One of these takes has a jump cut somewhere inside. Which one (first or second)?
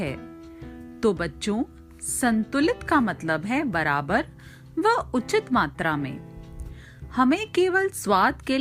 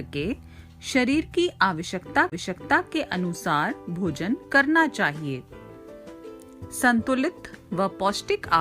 second